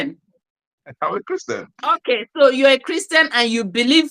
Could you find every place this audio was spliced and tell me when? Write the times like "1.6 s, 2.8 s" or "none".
2.0 s